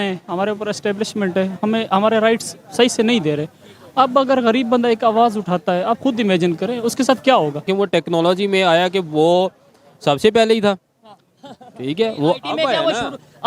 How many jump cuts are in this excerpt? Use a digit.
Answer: 1